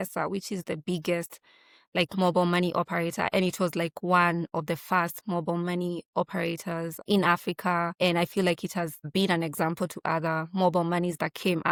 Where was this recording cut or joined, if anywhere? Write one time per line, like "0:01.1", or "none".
none